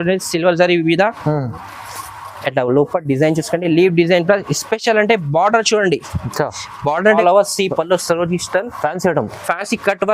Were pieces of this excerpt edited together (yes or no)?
yes